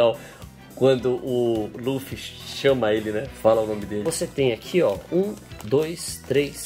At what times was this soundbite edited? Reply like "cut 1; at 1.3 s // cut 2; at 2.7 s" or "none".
cut 1; at 4.0 s